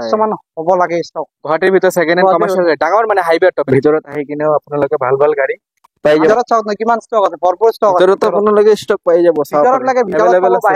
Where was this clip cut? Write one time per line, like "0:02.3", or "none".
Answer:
0:03.6
0:06.3